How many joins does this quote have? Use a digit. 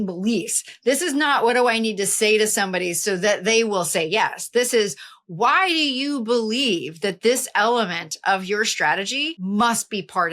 1